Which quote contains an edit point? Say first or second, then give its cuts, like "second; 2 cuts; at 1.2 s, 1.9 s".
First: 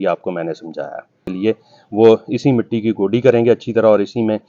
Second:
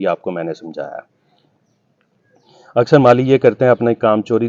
first; 1 cut; at 1.3 s